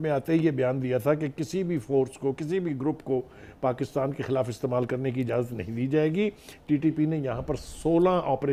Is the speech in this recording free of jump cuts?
yes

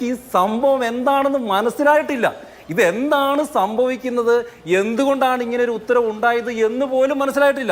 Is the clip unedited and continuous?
yes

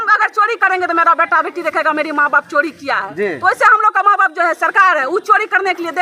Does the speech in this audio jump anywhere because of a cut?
no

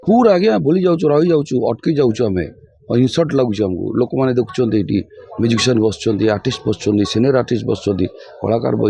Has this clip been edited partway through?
no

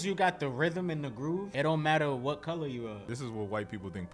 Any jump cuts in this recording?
yes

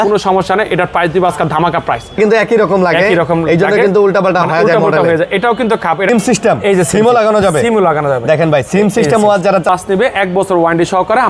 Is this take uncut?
no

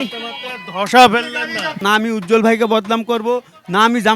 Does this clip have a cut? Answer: yes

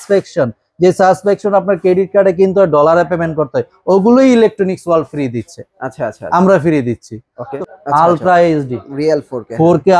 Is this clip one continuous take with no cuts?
no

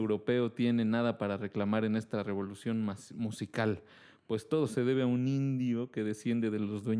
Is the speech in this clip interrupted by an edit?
no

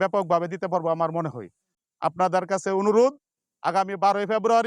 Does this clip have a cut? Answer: no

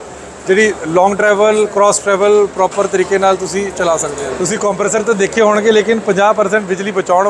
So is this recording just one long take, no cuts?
no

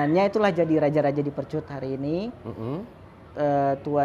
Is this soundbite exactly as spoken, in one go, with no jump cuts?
yes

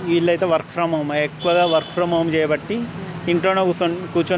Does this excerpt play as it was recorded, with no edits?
yes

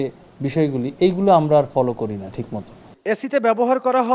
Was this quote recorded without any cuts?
yes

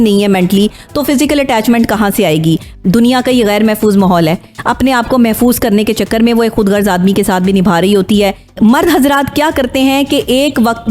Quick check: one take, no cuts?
no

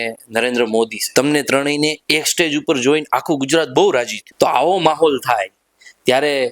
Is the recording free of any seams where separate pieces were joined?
no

